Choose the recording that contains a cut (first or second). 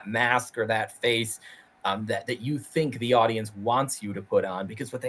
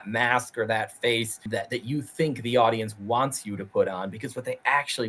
second